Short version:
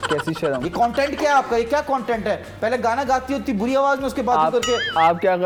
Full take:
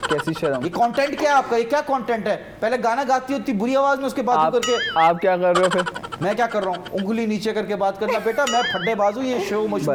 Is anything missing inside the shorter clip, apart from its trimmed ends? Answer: no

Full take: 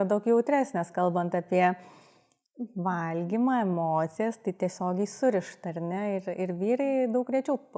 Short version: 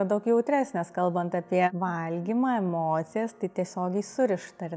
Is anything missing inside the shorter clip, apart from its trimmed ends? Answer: yes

